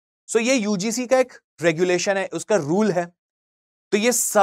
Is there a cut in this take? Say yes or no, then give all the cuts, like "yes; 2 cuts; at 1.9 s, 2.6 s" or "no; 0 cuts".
no; 0 cuts